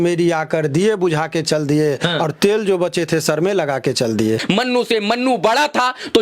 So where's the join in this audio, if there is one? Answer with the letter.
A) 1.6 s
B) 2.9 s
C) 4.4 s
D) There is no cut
C